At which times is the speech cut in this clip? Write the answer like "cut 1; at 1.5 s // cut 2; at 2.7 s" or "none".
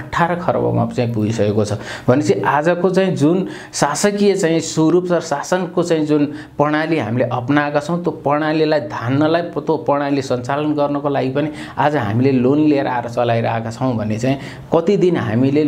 none